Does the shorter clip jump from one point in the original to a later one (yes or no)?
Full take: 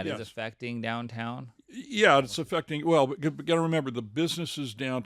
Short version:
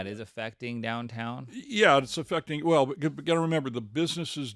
yes